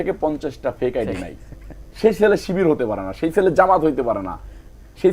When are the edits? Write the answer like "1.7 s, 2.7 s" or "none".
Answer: none

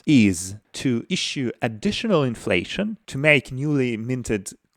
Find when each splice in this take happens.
0.9 s, 3.0 s

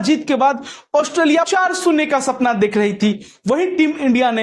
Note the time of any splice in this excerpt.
none

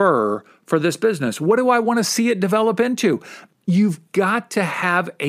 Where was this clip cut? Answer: 3.4 s

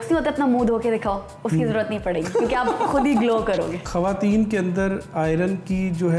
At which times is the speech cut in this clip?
3.8 s

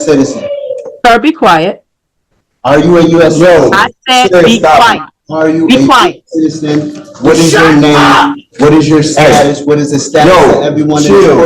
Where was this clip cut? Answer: none

